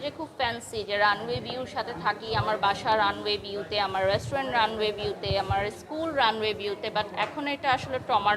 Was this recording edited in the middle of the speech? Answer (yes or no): no